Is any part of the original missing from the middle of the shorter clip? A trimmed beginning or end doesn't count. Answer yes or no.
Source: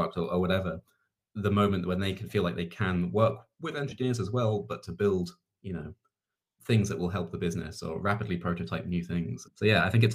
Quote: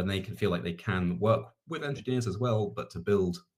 no